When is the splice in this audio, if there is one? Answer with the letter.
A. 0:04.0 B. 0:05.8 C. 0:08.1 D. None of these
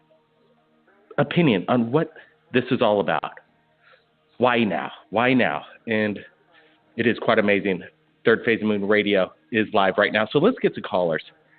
A